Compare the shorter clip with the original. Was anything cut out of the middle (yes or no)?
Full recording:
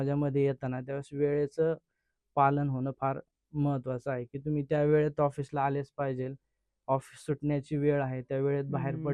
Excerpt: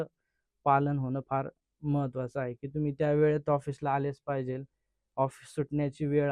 no